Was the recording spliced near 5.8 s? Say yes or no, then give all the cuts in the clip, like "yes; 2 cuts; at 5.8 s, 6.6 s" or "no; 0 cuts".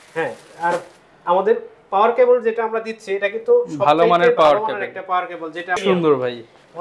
yes; 1 cut; at 5.8 s